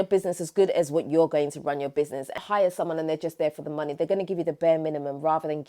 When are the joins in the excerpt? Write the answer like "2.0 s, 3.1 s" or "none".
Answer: 2.4 s

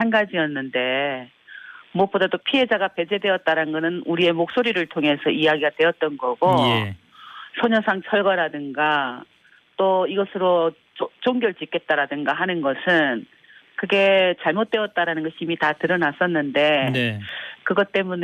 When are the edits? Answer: none

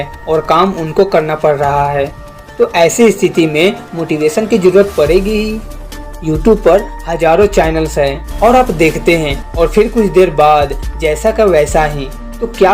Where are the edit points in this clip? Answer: 8.2 s

